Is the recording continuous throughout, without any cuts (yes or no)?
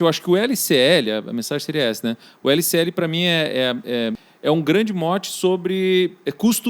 no